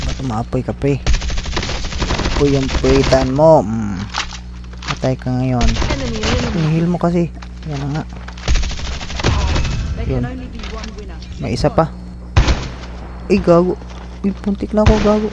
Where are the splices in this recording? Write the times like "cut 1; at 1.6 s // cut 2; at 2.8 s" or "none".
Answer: cut 1; at 6.6 s // cut 2; at 12.0 s